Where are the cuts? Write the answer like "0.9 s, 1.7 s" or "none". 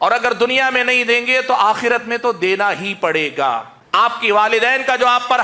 3.8 s